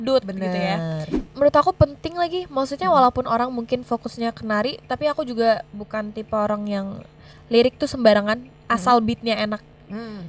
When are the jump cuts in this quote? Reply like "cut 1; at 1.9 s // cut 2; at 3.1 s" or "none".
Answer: cut 1; at 1.1 s